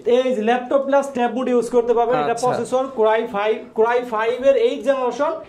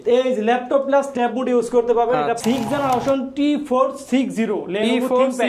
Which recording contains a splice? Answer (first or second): second